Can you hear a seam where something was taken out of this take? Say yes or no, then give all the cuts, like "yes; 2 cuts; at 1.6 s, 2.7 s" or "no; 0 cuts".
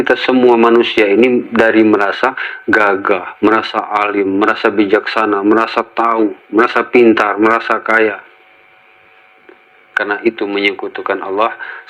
no; 0 cuts